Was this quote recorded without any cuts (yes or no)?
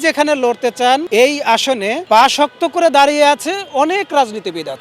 no